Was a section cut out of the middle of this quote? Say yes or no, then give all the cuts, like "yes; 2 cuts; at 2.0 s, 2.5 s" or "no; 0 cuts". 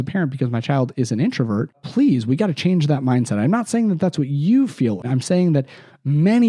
yes; 1 cut; at 5.0 s